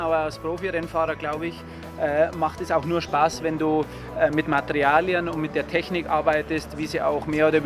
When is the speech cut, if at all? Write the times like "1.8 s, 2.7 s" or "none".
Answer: none